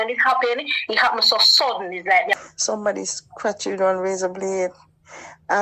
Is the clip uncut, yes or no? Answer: no